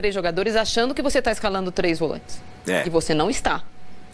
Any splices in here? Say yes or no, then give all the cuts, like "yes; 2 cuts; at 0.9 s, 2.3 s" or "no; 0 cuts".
no; 0 cuts